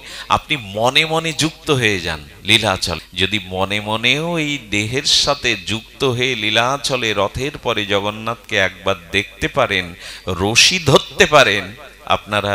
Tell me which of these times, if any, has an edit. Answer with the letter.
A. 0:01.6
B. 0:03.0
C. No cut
B